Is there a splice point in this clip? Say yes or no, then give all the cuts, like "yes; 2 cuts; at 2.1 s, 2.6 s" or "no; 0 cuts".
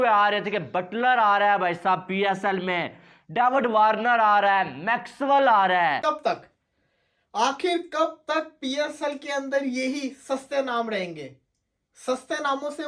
yes; 1 cut; at 6.0 s